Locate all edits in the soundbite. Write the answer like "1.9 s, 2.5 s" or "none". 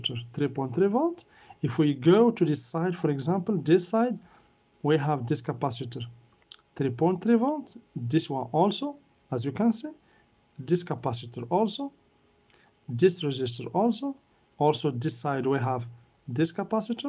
none